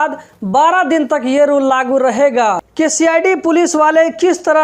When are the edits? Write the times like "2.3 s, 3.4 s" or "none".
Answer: 2.7 s